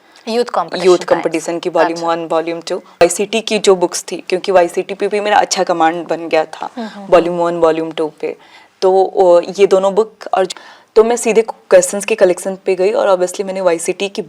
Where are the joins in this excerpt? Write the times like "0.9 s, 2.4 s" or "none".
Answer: 3.0 s, 10.5 s